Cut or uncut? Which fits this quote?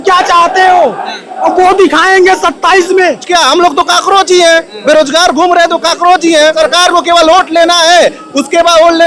cut